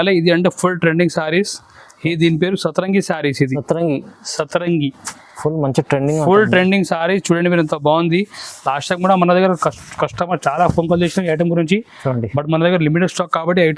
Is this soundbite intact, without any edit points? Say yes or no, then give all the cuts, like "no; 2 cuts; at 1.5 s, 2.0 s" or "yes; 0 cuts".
yes; 0 cuts